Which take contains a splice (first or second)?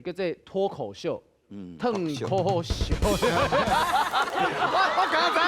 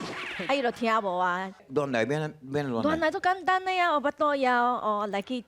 second